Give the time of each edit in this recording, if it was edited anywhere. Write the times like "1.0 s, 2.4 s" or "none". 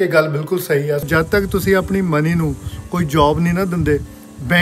1.0 s